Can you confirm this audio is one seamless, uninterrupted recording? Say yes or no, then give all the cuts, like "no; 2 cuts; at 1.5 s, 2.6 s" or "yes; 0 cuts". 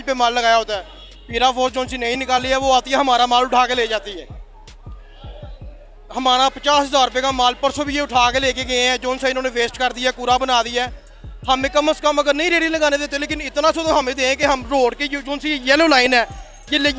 yes; 0 cuts